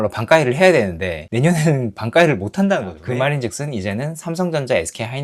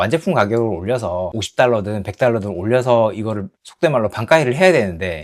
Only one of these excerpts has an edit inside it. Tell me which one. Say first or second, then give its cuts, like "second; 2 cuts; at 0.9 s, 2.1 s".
first; 1 cut; at 3.0 s